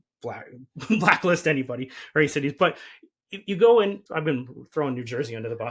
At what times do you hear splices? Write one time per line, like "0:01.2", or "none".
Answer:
none